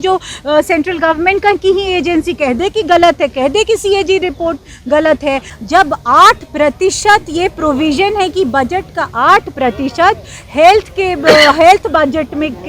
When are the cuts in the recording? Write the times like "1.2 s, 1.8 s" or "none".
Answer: 5.5 s